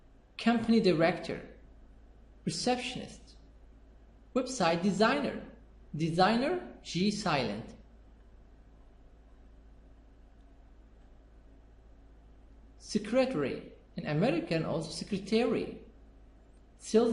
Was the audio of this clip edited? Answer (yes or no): no